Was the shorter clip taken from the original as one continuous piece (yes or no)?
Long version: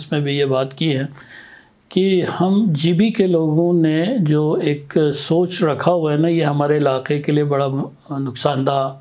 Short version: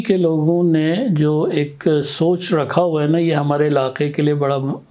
yes